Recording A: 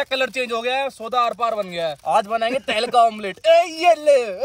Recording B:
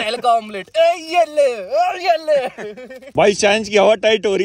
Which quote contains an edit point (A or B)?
B